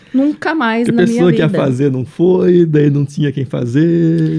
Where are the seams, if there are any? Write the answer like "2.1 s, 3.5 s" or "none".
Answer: none